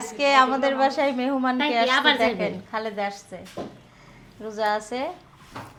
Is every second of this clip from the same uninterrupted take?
yes; 0 cuts

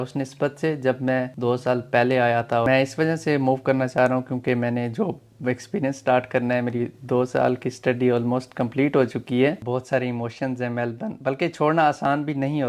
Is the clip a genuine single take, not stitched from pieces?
no; 3 cuts; at 1.3 s, 2.6 s, 9.6 s

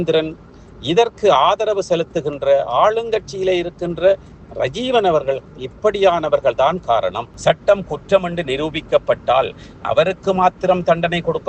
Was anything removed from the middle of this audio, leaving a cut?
yes; 1 cut; at 7.3 s

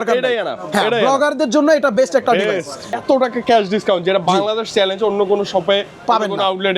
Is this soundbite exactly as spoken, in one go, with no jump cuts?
no; 1 cut; at 2.9 s

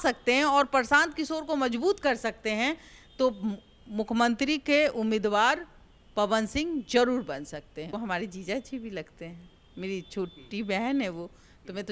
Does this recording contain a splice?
yes; 1 cut; at 7.9 s

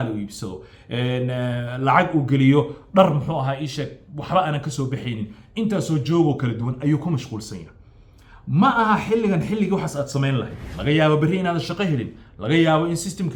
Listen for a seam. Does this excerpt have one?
yes; 1 cut; at 10.6 s

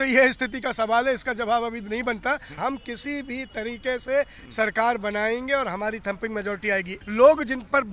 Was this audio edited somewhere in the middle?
yes; 2 cuts; at 2.5 s, 6.9 s

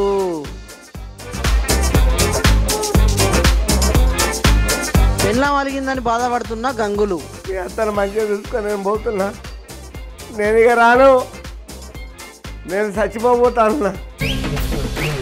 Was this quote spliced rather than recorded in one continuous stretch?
yes; 1 cut; at 14.1 s

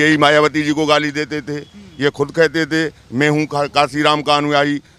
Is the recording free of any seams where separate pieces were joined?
yes; 0 cuts

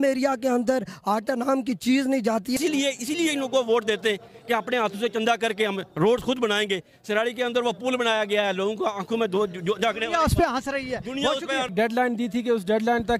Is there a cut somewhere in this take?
yes; 2 cuts; at 2.6 s, 11.7 s

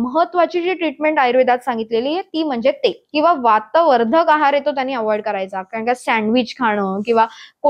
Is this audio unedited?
no; 1 cut; at 3.0 s

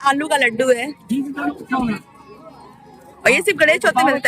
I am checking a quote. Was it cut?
yes; 1 cut; at 3.1 s

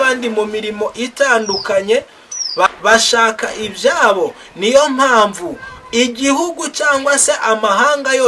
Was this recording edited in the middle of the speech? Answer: yes; 1 cut; at 2.7 s

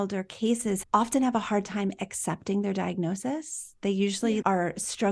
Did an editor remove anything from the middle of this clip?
no; 0 cuts

